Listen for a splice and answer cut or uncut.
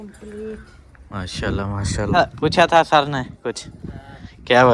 cut